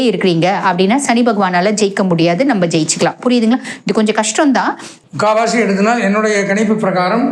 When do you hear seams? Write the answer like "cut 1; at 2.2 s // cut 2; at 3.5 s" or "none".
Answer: cut 1; at 4.9 s